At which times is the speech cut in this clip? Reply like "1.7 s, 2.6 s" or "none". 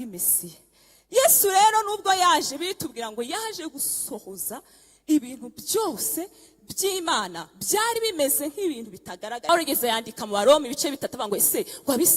9.5 s